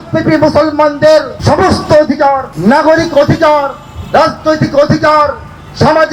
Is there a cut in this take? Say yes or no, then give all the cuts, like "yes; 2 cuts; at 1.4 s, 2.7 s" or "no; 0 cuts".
yes; 2 cuts; at 1.3 s, 2.5 s